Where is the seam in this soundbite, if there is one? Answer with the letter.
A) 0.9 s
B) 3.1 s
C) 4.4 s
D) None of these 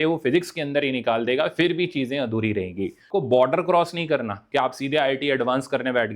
B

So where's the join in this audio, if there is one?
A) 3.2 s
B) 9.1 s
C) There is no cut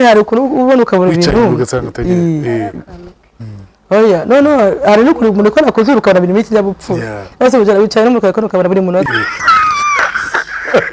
B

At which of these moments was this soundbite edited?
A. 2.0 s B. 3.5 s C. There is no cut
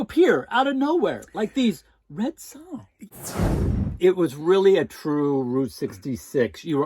B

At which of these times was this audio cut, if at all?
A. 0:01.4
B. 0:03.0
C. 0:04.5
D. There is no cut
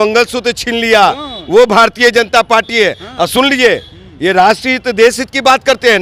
D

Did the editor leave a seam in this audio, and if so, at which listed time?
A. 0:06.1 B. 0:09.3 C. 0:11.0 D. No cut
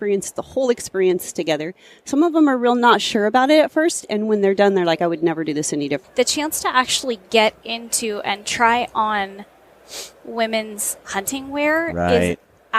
A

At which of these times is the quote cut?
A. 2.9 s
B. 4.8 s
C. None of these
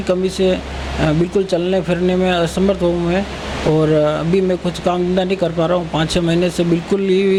C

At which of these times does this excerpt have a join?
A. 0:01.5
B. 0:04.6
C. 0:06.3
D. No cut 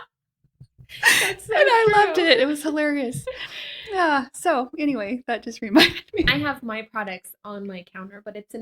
C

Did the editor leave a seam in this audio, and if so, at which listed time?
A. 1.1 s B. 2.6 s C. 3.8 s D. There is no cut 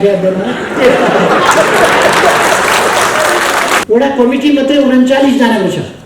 C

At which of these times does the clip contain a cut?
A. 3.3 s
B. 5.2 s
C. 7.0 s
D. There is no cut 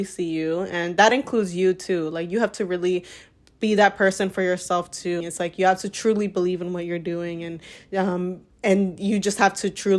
B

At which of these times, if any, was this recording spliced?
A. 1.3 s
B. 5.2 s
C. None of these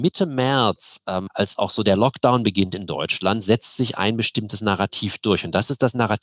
A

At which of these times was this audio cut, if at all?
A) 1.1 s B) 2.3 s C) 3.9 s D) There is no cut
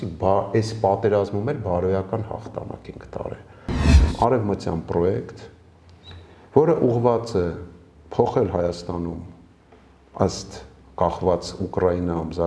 C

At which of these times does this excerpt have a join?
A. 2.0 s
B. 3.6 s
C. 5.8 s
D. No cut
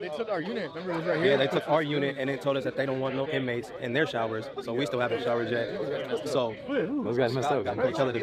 D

